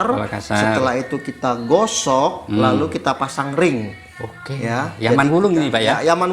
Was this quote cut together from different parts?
no; 0 cuts

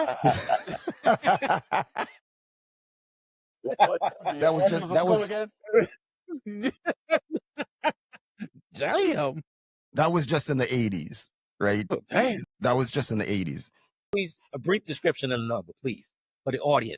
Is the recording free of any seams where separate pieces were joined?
no; 1 cut; at 14.1 s

